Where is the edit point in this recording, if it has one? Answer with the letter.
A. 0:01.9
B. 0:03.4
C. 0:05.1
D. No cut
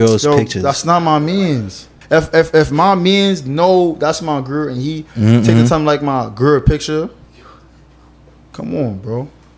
A